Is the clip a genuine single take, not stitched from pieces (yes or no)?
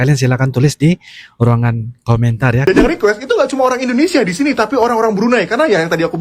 no